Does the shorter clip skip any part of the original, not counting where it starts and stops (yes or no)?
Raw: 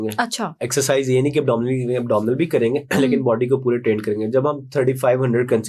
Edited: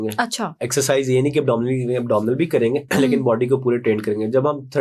no